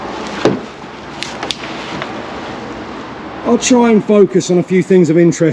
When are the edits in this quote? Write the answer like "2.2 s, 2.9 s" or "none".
3.3 s